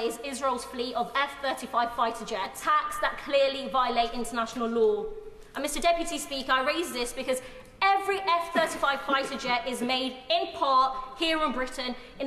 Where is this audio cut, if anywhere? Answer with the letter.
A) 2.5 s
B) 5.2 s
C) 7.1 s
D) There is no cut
A